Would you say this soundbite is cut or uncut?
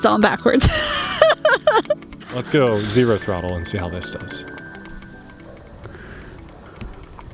cut